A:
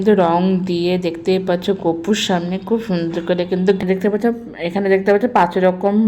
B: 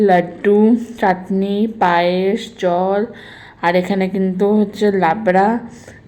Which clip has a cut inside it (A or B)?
A